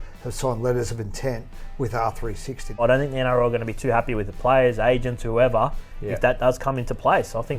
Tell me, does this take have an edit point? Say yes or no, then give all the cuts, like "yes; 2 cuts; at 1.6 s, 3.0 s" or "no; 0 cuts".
yes; 1 cut; at 2.8 s